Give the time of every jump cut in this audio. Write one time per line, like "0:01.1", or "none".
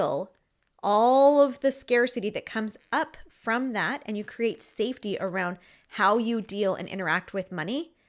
none